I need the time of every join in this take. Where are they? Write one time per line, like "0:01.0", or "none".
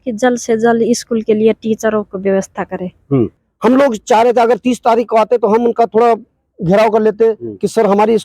0:03.4